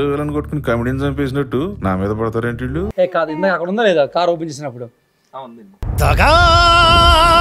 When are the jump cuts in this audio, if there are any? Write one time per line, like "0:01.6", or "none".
0:02.9